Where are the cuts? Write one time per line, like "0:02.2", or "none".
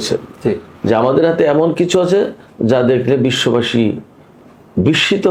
none